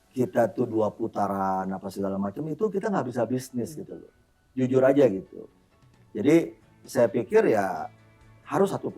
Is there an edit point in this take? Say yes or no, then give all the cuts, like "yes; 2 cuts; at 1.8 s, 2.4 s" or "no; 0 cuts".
no; 0 cuts